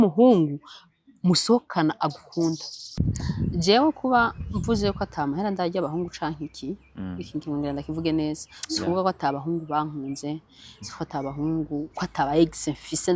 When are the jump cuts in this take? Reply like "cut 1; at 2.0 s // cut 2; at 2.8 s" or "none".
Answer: cut 1; at 3.0 s